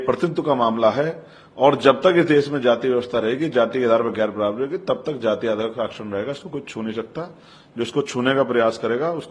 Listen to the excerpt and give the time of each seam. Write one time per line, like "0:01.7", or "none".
none